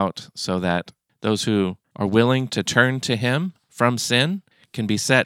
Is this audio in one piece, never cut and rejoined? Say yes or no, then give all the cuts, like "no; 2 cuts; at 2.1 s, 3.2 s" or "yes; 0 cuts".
no; 2 cuts; at 1.0 s, 1.8 s